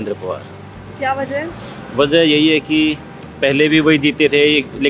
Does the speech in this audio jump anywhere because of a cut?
no; 0 cuts

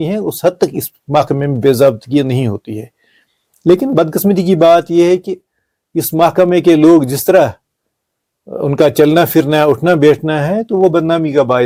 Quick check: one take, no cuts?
yes; 0 cuts

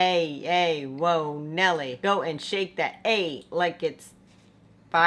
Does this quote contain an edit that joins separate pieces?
no; 0 cuts

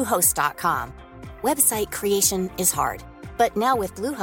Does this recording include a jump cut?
no; 0 cuts

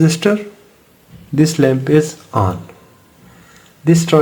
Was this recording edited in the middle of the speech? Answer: no; 0 cuts

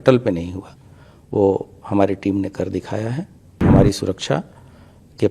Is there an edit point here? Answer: yes; 1 cut; at 3.6 s

